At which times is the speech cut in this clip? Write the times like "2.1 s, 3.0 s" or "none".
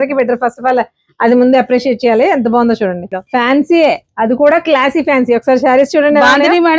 3.2 s